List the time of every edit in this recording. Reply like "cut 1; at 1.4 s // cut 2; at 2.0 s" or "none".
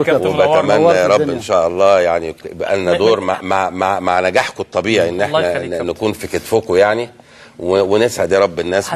none